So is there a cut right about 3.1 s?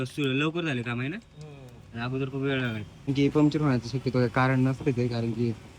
yes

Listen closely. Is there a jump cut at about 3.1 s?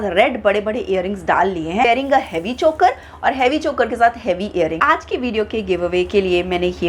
no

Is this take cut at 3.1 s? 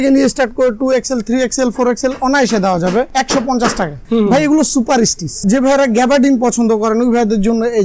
yes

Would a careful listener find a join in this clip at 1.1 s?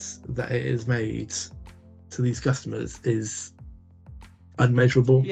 no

